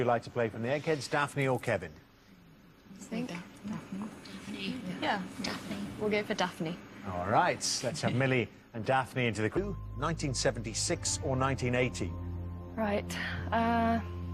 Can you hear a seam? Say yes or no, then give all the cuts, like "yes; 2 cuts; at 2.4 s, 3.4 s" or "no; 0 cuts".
no; 0 cuts